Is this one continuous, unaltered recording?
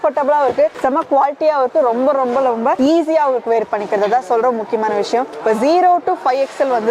yes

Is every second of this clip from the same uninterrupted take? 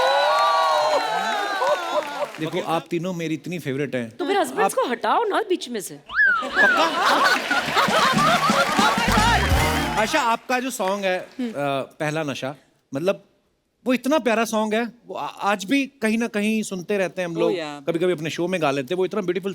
no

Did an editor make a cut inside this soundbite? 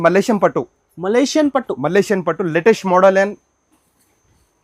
no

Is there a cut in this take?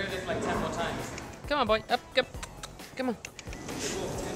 no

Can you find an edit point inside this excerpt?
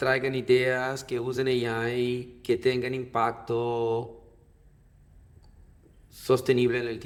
no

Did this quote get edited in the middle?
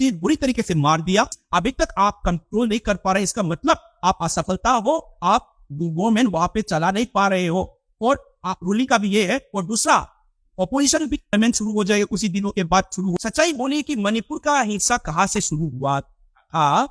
yes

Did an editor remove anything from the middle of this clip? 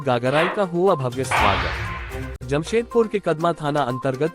yes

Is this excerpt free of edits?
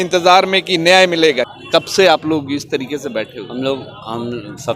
yes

